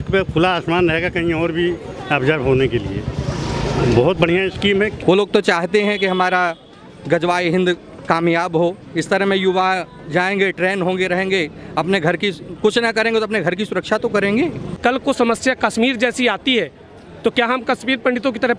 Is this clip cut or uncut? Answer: cut